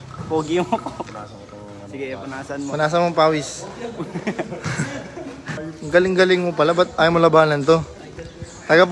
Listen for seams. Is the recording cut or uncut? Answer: cut